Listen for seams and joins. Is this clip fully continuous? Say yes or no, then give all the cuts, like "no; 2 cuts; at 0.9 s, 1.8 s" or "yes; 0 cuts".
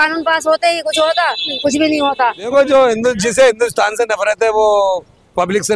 no; 1 cut; at 2.5 s